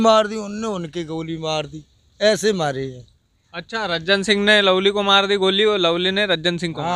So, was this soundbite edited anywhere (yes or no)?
no